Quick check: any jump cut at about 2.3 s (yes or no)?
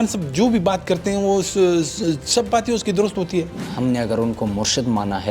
no